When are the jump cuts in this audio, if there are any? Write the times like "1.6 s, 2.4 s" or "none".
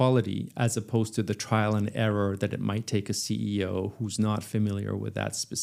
none